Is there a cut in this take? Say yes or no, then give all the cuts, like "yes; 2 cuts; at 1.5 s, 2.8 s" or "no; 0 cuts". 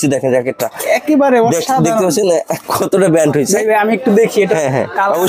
no; 0 cuts